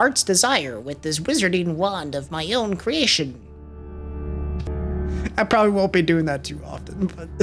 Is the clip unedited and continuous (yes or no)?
no